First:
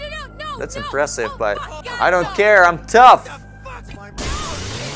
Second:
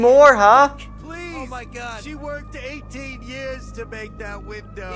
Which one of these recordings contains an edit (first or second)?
first